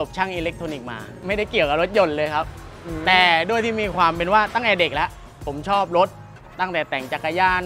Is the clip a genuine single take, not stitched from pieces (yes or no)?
yes